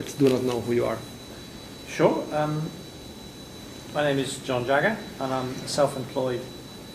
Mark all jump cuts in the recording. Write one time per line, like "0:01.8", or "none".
0:02.4